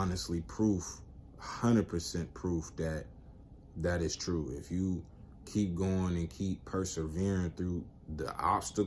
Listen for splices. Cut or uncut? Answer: uncut